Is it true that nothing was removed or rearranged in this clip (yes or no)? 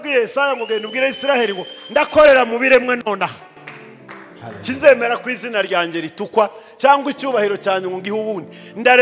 yes